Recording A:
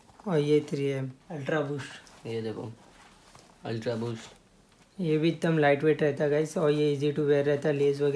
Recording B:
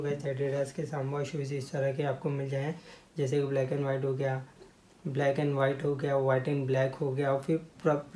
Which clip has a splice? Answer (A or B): A